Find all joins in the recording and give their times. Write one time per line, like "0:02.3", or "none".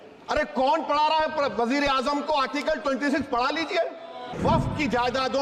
0:04.4